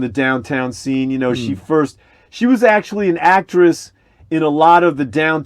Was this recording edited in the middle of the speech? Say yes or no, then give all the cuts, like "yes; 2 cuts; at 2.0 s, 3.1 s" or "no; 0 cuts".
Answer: no; 0 cuts